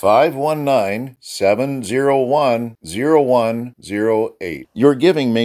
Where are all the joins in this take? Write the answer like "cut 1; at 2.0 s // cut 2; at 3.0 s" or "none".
none

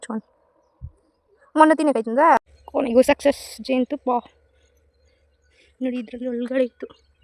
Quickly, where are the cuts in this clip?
cut 1; at 2.4 s

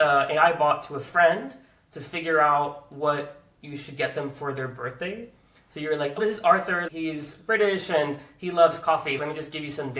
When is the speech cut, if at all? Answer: cut 1; at 6.2 s

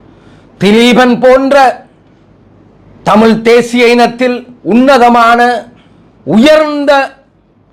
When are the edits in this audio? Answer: none

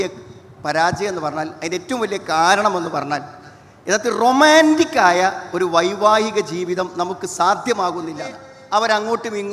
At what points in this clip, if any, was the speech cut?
cut 1; at 8.5 s

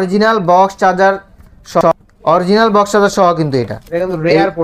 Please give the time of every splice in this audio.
cut 1; at 1.8 s

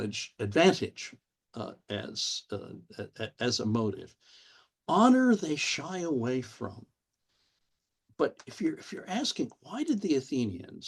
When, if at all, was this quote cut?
none

